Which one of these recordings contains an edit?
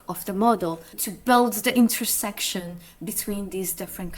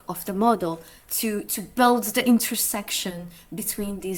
first; 1 cut; at 1.0 s

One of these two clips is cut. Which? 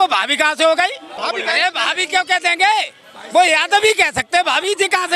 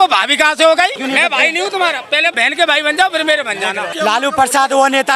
second; 3 cuts; at 1.0 s, 2.3 s, 3.8 s

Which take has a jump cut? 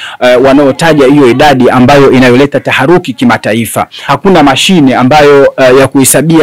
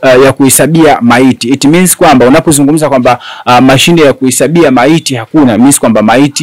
first; 1 cut; at 4.0 s

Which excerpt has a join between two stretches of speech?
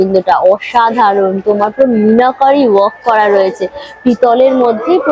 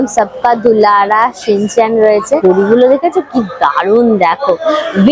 second; 1 cut; at 2.4 s

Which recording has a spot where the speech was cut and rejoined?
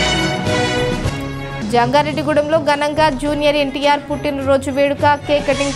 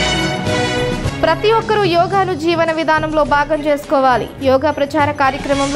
first; 1 cut; at 1.0 s

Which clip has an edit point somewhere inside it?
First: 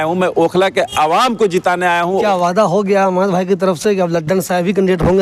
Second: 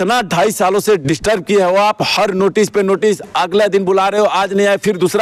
first; 1 cut; at 2.2 s

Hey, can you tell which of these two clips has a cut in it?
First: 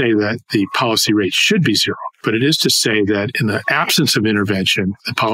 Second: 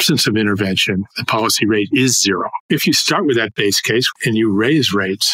second; 2 cuts; at 2.6 s, 3.7 s

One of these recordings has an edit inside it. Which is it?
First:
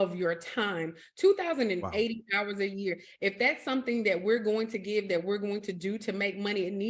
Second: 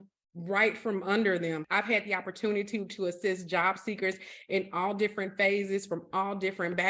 second; 1 cut; at 1.6 s

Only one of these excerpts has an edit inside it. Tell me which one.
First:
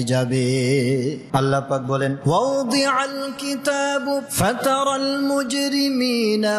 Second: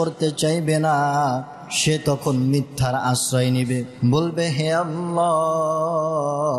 first; 1 cut; at 1.2 s

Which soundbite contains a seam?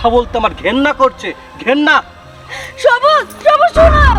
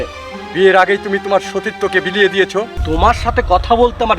second; 1 cut; at 2.8 s

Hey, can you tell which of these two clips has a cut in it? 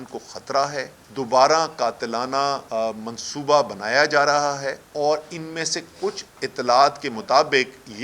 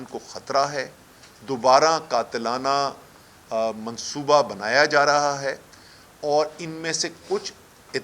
first; 4 cuts; at 1.0 s, 2.6 s, 4.8 s, 6.3 s

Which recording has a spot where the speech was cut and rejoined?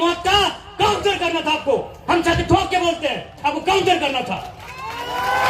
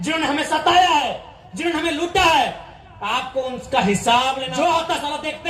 second; 1 cut; at 4.5 s

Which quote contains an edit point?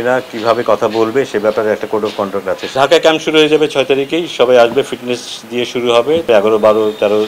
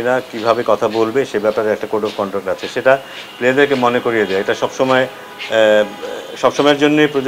first; 2 cuts; at 2.7 s, 6.2 s

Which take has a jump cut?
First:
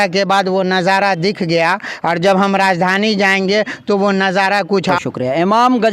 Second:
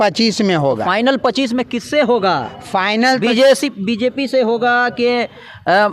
first; 1 cut; at 4.9 s

